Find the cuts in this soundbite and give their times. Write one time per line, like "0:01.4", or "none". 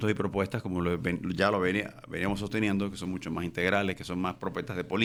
none